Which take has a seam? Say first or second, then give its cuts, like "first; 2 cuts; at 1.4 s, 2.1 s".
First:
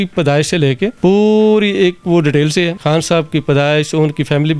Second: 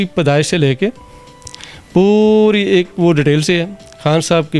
first; 2 cuts; at 0.9 s, 2.8 s